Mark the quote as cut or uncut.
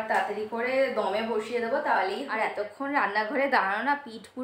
cut